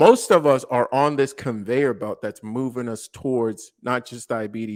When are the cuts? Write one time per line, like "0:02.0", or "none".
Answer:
none